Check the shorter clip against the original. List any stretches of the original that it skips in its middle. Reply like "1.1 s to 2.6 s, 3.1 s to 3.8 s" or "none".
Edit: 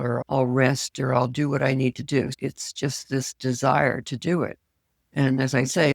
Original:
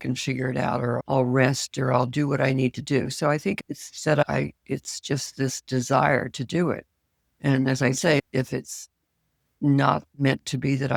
3.1 s to 4.6 s

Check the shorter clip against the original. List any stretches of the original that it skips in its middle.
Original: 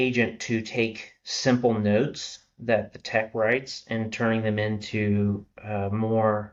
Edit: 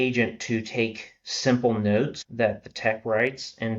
2.2 s to 2.5 s

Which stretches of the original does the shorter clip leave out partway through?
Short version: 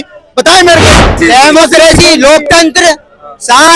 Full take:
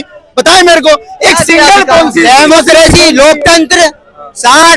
1.2 s to 2.1 s

